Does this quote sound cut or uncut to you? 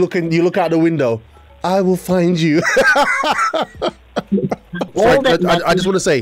cut